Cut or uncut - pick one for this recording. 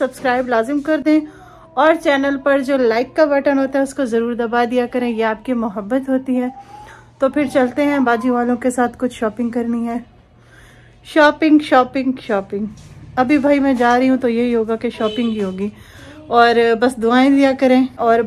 uncut